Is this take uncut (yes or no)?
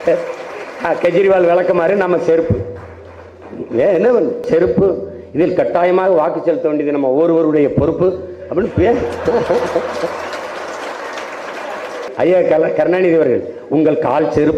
no